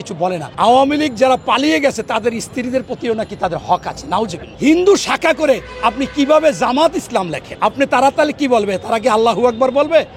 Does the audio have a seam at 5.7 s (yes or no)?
no